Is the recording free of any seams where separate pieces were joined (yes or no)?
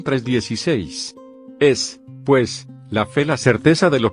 no